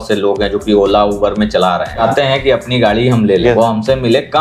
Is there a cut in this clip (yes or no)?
yes